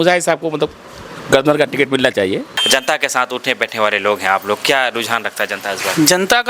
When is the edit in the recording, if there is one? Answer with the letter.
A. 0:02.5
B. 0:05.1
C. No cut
A